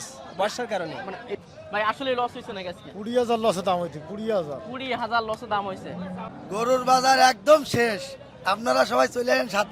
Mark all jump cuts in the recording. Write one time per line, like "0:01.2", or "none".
0:01.3
0:06.2